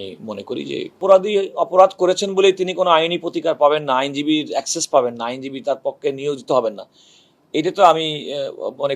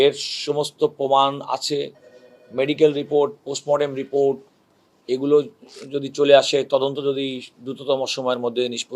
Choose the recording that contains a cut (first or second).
first